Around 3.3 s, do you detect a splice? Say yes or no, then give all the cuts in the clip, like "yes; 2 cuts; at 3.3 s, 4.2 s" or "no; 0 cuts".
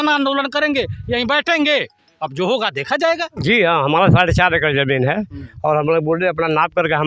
yes; 1 cut; at 3.3 s